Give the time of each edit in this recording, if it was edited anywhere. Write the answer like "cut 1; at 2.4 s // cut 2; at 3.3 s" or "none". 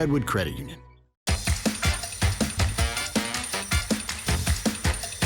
cut 1; at 1.0 s